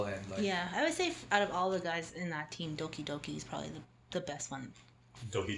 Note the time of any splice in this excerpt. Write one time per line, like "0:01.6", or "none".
none